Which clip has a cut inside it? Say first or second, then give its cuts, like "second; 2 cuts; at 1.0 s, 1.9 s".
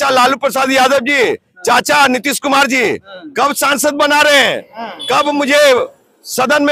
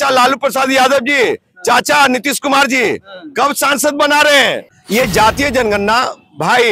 second; 1 cut; at 5.1 s